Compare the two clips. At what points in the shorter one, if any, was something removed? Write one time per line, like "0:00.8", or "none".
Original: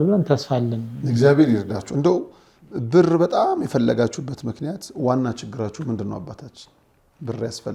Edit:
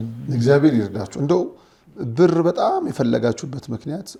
none